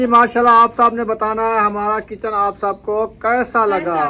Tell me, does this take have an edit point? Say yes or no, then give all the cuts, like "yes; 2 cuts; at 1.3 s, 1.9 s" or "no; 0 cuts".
no; 0 cuts